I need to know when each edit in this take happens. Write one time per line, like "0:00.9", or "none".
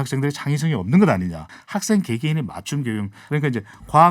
0:01.5
0:03.2